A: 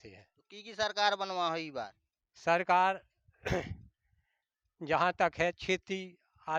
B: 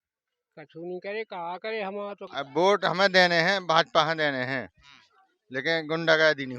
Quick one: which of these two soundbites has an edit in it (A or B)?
B